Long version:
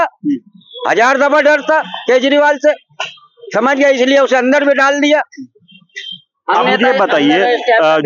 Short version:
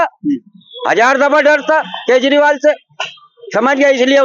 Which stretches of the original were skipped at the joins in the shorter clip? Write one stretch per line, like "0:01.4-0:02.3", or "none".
none